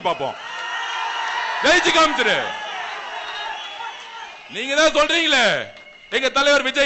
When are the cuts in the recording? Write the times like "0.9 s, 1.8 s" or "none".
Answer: none